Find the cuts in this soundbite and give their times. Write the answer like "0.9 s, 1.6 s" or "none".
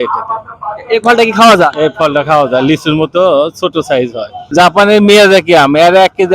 4.4 s

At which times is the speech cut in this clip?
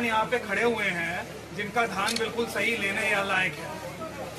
none

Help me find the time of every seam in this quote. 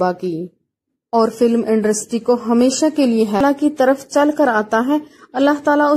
3.4 s

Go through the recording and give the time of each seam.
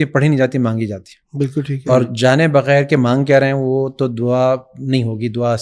none

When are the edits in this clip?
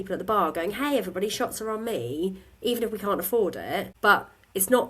3.9 s

